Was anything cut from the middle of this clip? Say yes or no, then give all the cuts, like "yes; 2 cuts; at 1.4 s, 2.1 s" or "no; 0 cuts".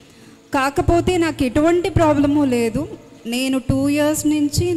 no; 0 cuts